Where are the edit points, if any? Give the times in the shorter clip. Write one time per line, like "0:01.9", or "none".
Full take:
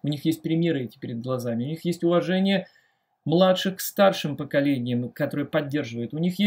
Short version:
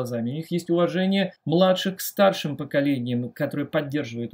0:01.4